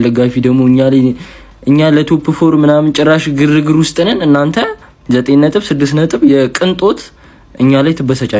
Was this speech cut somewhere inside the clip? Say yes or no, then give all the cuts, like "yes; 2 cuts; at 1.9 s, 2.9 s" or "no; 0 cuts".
no; 0 cuts